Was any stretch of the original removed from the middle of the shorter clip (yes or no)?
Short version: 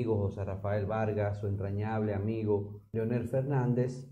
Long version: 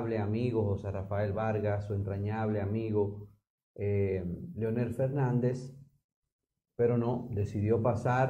yes